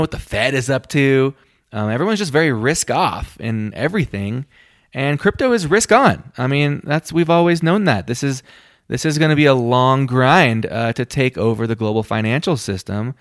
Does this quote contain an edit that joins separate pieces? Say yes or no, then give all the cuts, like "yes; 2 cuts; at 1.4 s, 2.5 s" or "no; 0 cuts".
no; 0 cuts